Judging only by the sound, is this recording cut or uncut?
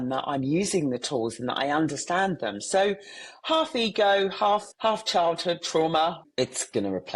cut